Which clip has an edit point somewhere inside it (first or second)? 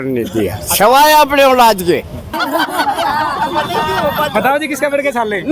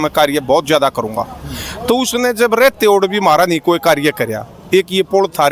first